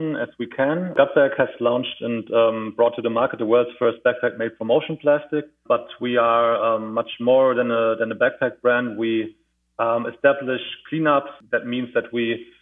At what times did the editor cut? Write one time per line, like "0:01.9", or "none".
0:00.9
0:05.6
0:11.4